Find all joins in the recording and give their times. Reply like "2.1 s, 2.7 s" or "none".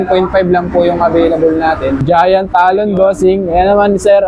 2.0 s